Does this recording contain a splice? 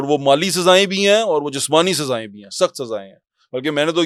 no; 0 cuts

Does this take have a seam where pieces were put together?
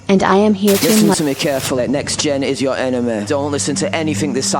yes; 1 cut; at 1.1 s

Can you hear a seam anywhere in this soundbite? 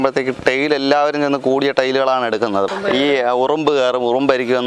yes; 1 cut; at 2.7 s

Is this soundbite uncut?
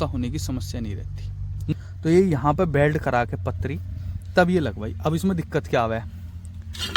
no; 1 cut; at 1.7 s

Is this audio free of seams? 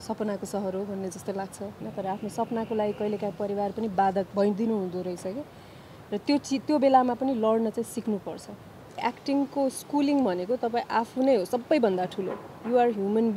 no; 3 cuts; at 1.8 s, 4.3 s, 9.0 s

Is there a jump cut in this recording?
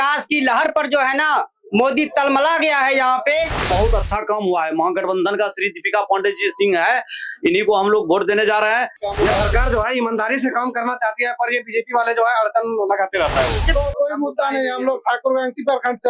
yes; 3 cuts; at 3.6 s, 9.0 s, 13.7 s

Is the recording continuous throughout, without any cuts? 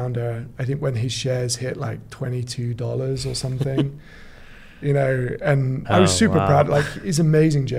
yes; 0 cuts

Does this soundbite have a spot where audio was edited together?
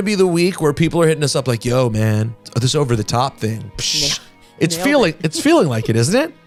no; 0 cuts

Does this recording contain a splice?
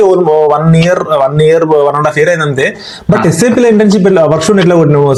no; 0 cuts

